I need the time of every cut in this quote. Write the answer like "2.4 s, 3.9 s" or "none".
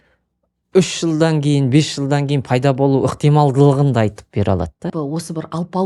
4.9 s